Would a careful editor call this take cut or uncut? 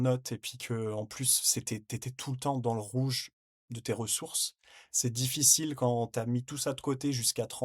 uncut